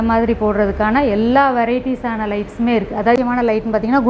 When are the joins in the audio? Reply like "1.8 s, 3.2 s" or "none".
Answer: 3.2 s